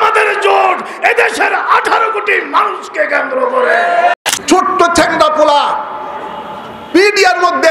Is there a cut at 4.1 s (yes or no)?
yes